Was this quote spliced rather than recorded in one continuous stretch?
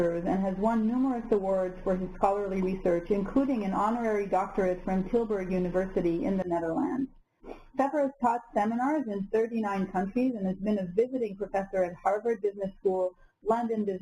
yes; 1 cut; at 2.7 s

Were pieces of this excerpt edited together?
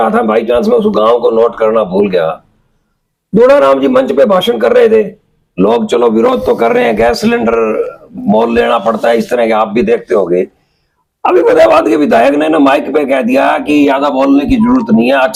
no; 0 cuts

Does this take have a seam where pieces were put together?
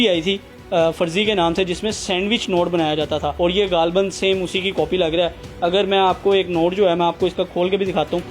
yes; 1 cut; at 3.3 s

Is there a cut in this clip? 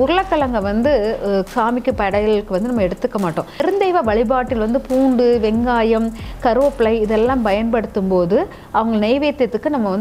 yes; 1 cut; at 3.6 s

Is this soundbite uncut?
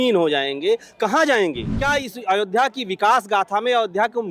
no; 1 cut; at 1.7 s

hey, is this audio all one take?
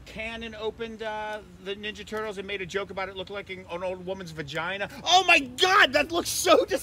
no; 1 cut; at 4.9 s

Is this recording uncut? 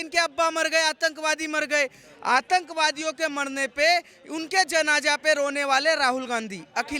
yes; 0 cuts

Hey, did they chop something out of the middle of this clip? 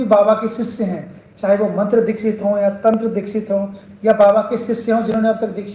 no; 0 cuts

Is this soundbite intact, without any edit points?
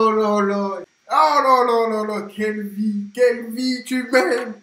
no; 1 cut; at 1.0 s

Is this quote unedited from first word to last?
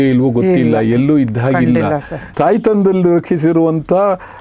no; 1 cut; at 2.2 s

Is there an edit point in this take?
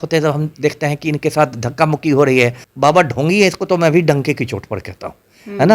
yes; 1 cut; at 2.6 s

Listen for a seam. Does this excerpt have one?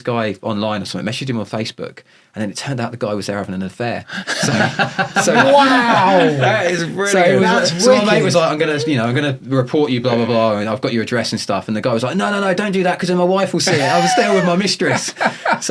no; 0 cuts

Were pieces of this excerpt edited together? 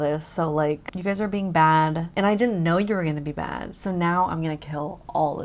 yes; 2 cuts; at 0.9 s, 2.0 s

